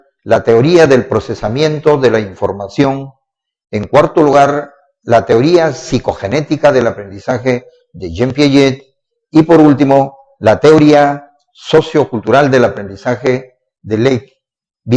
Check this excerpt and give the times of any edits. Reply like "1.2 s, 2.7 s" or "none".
4.0 s